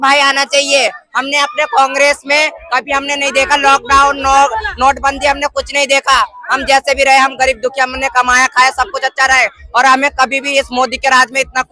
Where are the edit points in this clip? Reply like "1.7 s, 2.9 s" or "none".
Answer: none